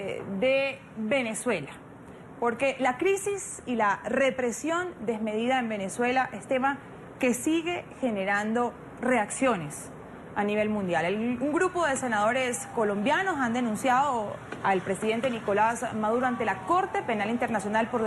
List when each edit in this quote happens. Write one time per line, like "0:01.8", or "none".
0:12.5